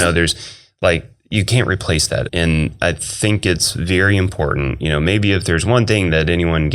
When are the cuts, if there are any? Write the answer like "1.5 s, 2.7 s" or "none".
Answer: 2.3 s